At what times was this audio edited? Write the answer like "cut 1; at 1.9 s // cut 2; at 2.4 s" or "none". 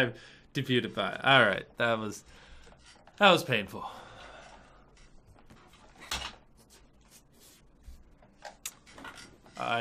cut 1; at 7.6 s